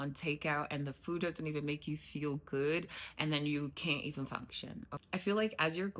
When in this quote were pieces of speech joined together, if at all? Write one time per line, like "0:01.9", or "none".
0:04.9